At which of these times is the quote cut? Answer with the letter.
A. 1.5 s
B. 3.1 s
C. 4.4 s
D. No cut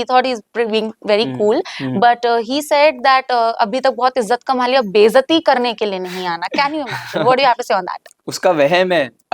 D